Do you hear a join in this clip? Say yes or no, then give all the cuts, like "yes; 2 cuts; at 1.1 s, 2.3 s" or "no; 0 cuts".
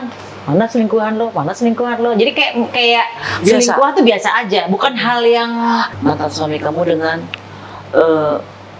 yes; 1 cut; at 5.9 s